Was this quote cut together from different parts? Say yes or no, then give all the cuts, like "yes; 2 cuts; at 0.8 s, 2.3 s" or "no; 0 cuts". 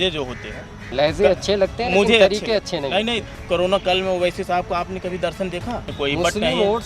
yes; 3 cuts; at 0.8 s, 3.2 s, 5.9 s